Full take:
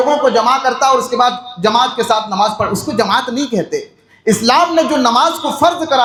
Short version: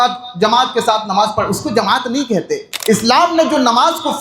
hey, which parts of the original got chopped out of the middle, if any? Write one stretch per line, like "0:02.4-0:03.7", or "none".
0:03.9-0:04.1